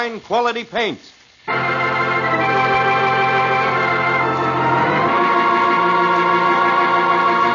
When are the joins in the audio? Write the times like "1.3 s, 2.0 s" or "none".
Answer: none